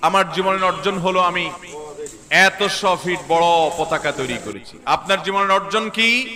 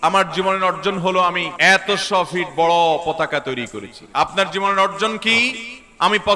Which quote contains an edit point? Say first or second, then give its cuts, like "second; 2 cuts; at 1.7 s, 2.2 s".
second; 1 cut; at 1.5 s